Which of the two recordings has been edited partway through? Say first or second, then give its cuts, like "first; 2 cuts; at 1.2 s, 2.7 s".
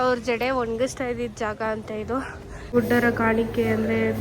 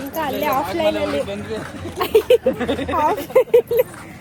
first; 1 cut; at 2.7 s